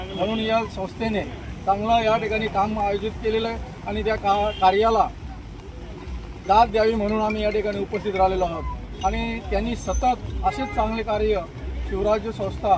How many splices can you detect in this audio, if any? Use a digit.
0